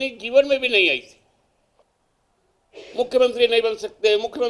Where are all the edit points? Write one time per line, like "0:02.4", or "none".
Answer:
0:01.8